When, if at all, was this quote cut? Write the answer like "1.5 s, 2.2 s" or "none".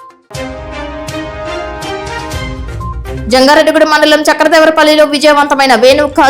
2.9 s